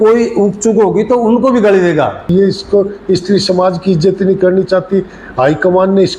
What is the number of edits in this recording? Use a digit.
1